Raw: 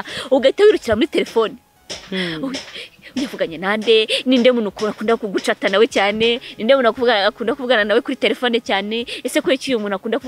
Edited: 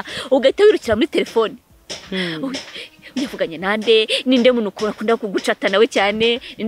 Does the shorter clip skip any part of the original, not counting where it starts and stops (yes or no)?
no